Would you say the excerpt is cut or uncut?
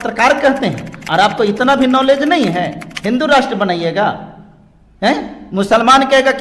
uncut